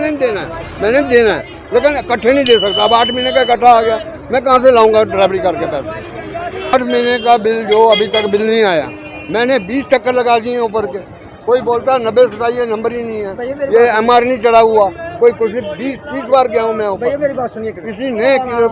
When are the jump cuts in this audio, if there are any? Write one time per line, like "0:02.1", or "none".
0:06.7